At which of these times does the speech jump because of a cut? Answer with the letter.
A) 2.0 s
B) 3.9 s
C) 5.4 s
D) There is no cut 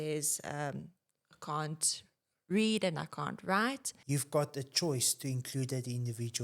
B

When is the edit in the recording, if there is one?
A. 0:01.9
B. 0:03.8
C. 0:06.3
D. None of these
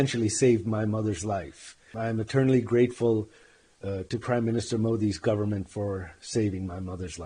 A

